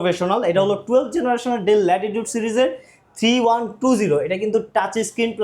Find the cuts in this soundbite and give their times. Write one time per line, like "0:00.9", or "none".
none

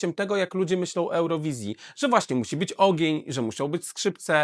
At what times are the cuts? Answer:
none

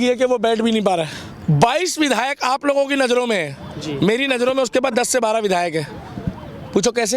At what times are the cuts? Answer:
0:01.3

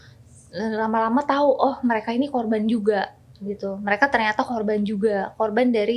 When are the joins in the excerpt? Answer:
none

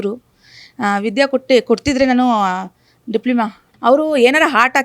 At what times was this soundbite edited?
0:03.6

